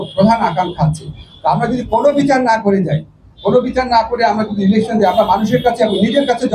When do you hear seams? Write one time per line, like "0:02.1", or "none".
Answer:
none